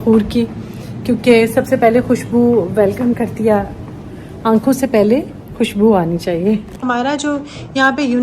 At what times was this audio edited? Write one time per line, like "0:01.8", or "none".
0:06.8